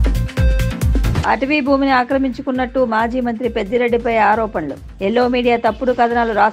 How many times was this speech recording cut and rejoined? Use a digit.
0